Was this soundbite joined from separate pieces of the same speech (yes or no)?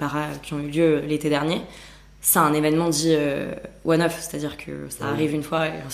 no